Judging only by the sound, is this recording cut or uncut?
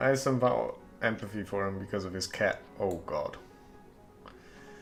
uncut